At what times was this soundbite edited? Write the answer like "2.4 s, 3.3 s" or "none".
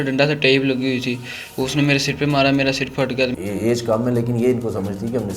3.3 s